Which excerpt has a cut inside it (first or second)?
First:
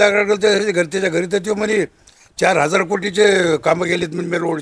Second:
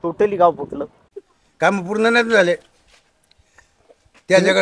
second